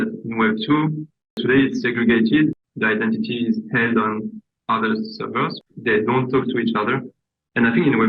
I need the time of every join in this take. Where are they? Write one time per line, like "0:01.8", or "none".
0:01.4
0:02.6
0:05.6

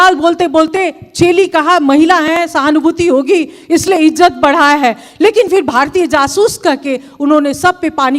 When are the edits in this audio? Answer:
none

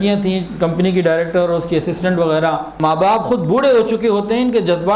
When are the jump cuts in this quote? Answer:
0:02.7

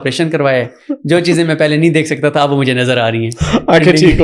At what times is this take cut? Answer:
none

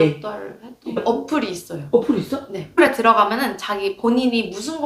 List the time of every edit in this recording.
0:01.0
0:02.7

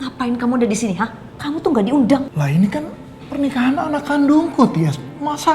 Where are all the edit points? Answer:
0:01.3
0:02.3

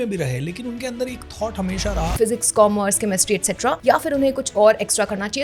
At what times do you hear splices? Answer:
0:02.2
0:03.8

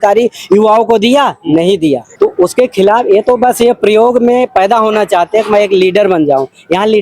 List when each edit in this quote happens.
0:02.1

